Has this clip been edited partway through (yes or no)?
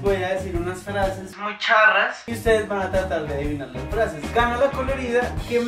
yes